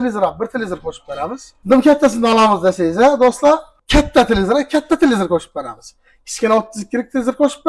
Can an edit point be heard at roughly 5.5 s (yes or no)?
no